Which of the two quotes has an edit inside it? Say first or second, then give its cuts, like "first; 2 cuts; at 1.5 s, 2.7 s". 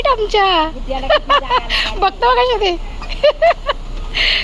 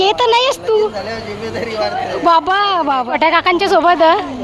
second; 1 cut; at 3.1 s